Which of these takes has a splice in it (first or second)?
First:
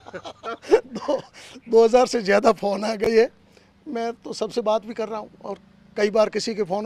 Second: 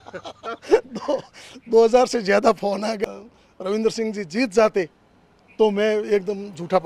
second